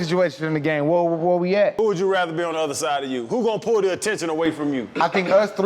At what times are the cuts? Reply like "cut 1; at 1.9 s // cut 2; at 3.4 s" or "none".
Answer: cut 1; at 1.7 s